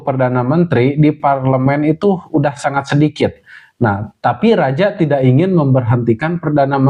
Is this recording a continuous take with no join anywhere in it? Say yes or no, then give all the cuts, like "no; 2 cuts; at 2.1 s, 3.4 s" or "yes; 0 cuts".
yes; 0 cuts